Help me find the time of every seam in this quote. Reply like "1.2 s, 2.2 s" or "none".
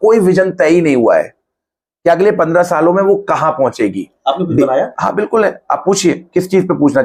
none